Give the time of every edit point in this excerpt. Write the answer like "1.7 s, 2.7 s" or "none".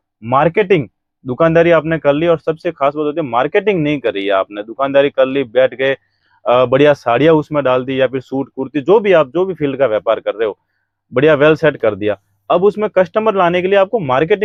none